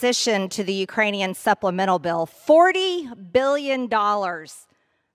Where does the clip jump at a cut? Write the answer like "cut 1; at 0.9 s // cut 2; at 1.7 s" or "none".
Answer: cut 1; at 2.3 s